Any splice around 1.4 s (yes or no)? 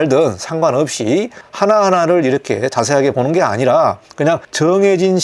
yes